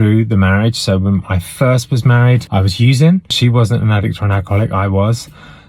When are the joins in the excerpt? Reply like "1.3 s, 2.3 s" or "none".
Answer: 2.4 s, 3.3 s